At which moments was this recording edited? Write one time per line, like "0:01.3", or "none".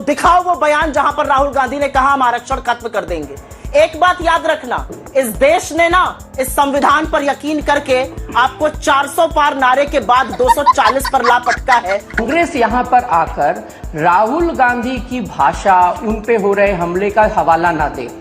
0:12.2

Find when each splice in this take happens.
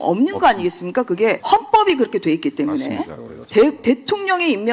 0:01.4

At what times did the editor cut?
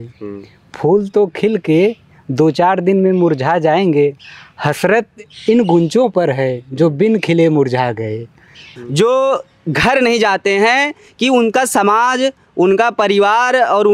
0:08.8

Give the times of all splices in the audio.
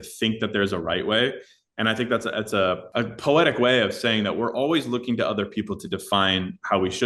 none

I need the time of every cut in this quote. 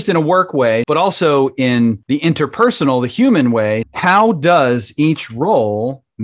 0:00.8
0:02.0
0:03.9

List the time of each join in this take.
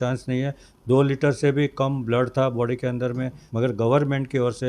0:03.4

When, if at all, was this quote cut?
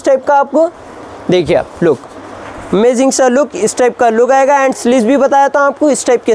none

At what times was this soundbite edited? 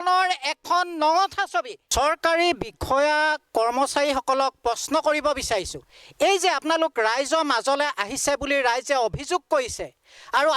0:01.8

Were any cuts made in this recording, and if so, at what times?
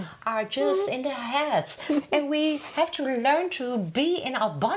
none

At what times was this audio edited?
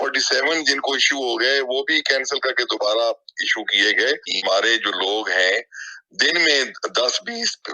0:04.3

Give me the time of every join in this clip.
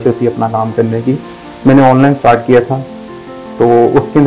none

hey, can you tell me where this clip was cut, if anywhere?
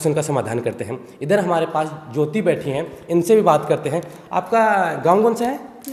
none

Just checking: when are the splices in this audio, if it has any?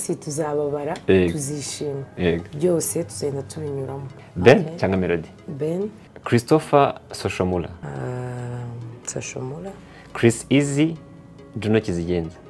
0:04.1
0:06.1
0:07.8

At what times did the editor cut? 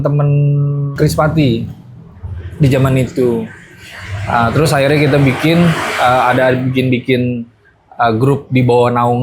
0:00.9

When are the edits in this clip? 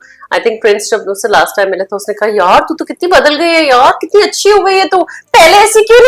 none

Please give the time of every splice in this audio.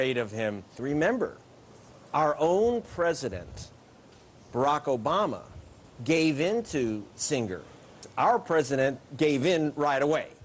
0:08.0

